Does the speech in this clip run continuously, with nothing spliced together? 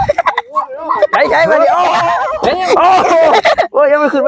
no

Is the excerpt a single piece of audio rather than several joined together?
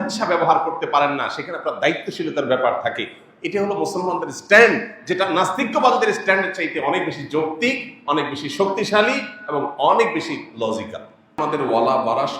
no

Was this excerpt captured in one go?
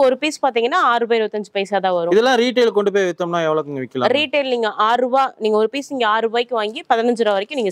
yes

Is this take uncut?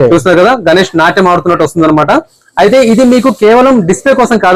yes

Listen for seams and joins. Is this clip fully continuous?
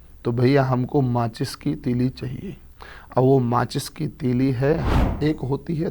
no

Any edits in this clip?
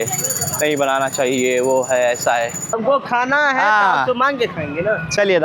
yes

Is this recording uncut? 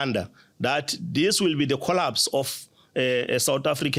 yes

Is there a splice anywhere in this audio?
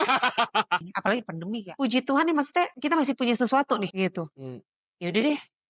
yes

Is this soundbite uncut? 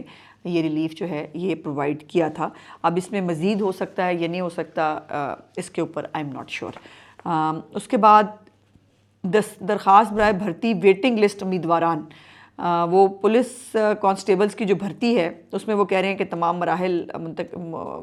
yes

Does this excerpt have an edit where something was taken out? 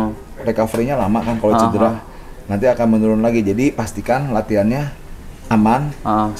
no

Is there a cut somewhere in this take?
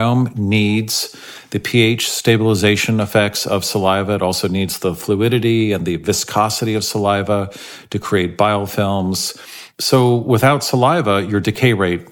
yes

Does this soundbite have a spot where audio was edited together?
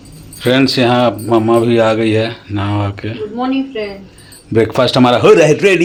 no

